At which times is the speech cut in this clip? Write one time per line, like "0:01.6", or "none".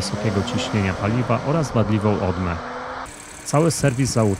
0:03.1

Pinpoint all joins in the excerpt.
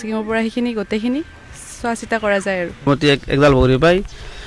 0:02.9

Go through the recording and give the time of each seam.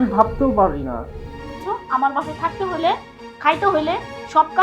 0:01.5

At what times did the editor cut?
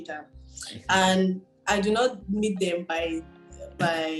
none

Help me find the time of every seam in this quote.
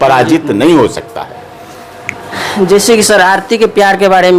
none

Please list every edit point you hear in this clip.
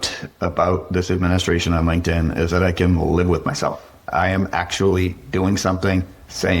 0:04.0

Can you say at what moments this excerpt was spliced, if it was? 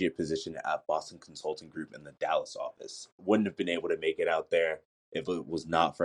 0:03.2

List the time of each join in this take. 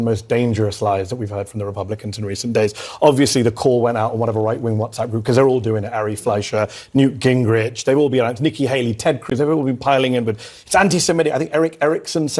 none

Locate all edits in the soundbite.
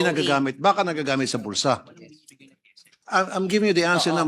0:02.9

